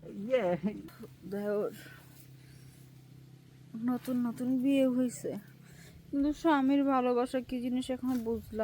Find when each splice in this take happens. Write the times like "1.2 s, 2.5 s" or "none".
0.9 s